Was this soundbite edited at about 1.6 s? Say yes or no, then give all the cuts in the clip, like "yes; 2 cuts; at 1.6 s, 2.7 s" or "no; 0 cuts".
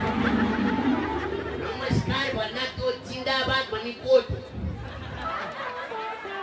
no; 0 cuts